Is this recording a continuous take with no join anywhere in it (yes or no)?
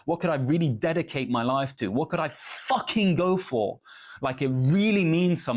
yes